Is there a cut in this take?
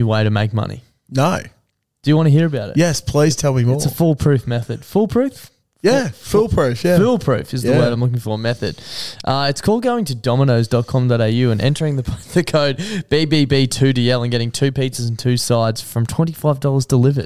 no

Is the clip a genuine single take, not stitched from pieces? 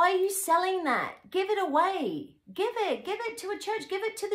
yes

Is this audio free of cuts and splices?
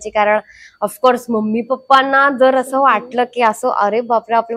yes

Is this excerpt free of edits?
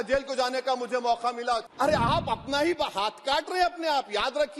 no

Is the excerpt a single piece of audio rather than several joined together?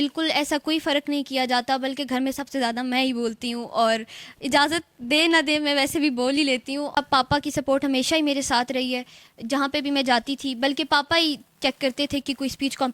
no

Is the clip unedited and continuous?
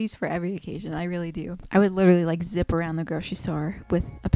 yes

